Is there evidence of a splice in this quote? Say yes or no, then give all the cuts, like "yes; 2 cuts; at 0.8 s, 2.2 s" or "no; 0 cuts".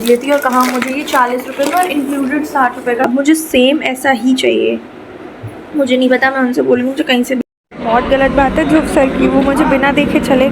yes; 2 cuts; at 3.1 s, 7.4 s